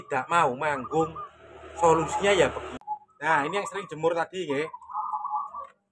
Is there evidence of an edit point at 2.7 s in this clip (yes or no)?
yes